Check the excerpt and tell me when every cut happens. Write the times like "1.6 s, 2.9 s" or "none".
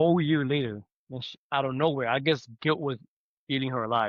none